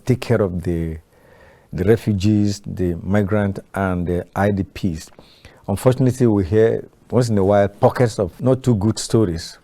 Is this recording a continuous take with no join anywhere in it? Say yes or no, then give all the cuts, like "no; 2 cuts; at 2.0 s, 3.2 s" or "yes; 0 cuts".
no; 1 cut; at 8.3 s